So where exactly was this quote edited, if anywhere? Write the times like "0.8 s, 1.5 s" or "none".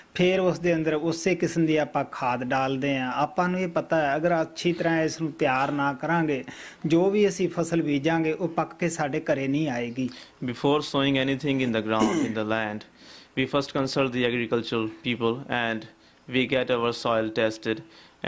5.8 s